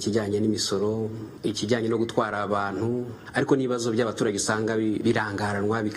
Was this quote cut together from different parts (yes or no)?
yes